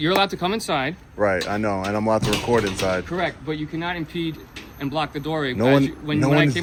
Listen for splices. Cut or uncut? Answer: uncut